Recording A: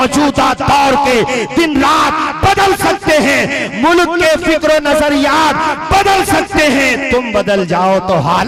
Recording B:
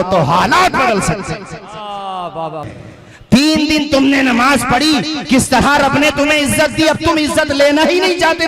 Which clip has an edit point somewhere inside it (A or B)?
B